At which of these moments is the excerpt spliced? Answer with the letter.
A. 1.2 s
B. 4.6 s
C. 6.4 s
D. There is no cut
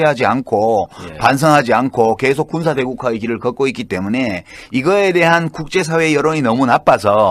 D